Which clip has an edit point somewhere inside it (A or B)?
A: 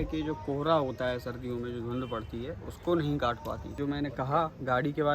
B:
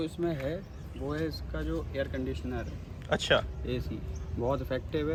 A